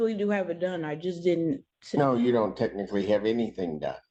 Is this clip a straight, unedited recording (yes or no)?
yes